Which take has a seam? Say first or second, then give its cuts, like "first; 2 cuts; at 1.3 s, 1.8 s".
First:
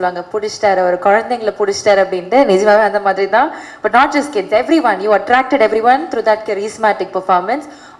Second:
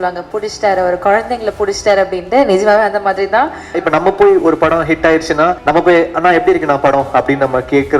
second; 2 cuts; at 3.8 s, 5.6 s